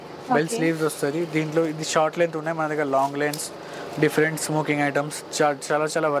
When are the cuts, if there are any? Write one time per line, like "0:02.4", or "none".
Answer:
none